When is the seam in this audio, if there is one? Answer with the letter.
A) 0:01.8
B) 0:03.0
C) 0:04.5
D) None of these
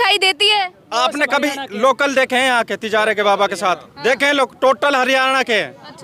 D